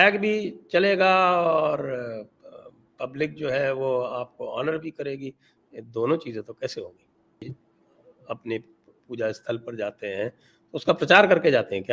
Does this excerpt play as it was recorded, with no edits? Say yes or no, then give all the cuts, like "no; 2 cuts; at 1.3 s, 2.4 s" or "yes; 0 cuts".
no; 1 cut; at 7.4 s